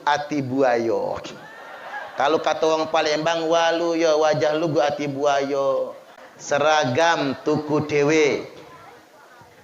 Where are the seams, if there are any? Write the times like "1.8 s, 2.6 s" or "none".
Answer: 6.0 s